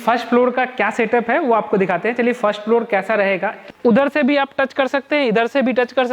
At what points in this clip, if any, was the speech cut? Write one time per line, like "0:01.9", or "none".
0:03.7